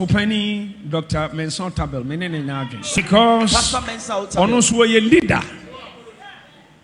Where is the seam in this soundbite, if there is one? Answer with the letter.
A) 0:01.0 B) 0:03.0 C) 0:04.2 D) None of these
B